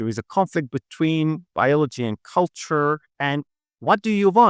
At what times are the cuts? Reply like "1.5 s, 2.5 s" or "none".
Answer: 3.1 s